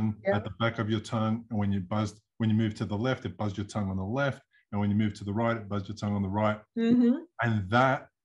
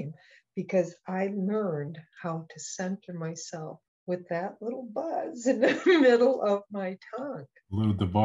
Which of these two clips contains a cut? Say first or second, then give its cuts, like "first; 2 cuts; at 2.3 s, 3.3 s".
second; 1 cut; at 3.9 s